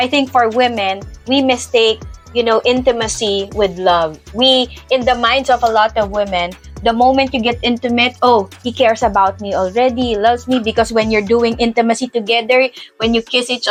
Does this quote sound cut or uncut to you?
uncut